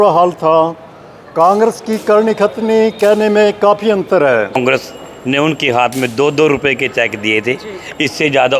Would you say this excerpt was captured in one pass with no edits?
no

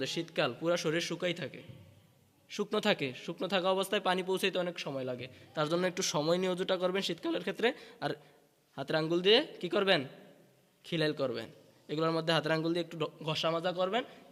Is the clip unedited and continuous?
yes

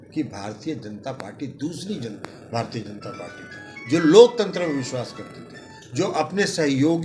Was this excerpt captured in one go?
yes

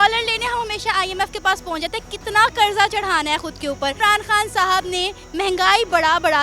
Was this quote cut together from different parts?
yes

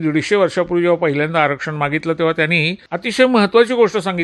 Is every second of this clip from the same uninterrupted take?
no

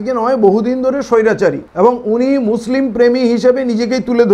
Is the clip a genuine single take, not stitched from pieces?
yes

